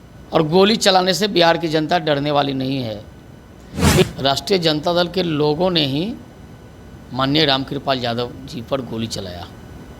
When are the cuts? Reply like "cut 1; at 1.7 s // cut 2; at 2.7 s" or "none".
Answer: cut 1; at 4.0 s